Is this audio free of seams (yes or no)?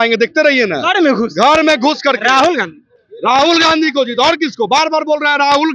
yes